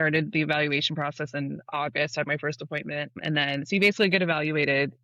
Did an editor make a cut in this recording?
no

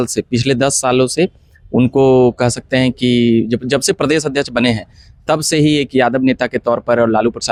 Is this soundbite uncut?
yes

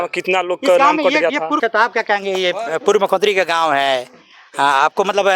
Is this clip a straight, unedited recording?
no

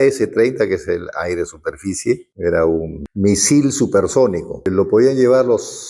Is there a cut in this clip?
yes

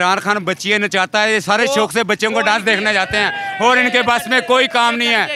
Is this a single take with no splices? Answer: yes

